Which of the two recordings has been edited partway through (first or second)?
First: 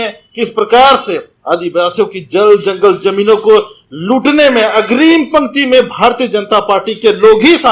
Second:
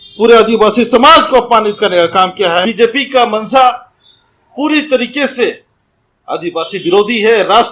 second